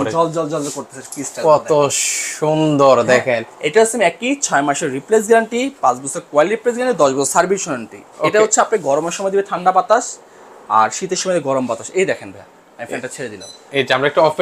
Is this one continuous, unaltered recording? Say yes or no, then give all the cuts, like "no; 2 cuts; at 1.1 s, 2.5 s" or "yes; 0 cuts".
yes; 0 cuts